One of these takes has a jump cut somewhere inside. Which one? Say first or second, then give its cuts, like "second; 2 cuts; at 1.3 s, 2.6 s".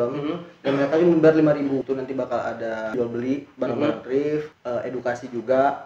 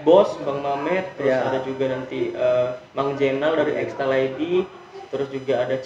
first; 3 cuts; at 1.8 s, 2.9 s, 4.5 s